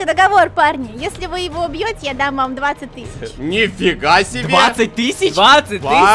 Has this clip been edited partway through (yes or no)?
no